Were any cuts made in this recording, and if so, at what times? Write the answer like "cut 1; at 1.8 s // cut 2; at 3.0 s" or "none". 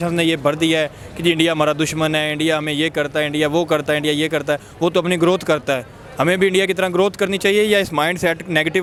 none